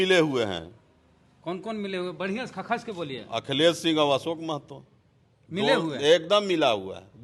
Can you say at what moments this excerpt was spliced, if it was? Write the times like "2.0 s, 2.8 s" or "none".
none